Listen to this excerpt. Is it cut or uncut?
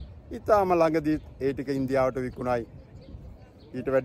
uncut